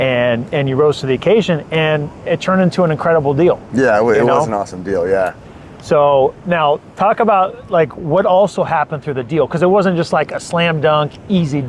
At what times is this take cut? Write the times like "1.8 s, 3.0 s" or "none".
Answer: none